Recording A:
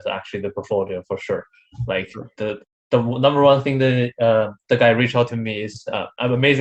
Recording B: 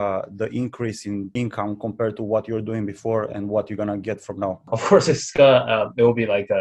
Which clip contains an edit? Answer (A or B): B